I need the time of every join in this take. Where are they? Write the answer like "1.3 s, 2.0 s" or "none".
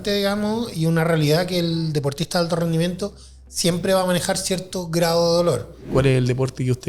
5.7 s